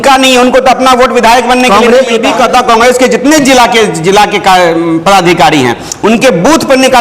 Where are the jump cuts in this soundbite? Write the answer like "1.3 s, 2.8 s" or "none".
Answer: 2.2 s